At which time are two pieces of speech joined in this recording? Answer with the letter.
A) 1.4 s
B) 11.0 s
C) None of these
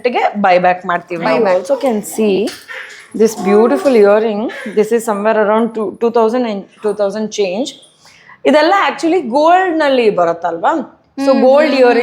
A